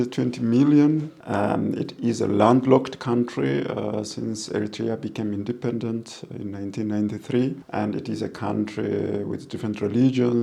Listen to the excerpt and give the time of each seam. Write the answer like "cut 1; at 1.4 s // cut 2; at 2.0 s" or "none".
cut 1; at 1.2 s // cut 2; at 7.6 s